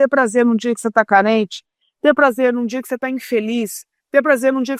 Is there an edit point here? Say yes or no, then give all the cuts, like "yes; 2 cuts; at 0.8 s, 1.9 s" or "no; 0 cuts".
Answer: no; 0 cuts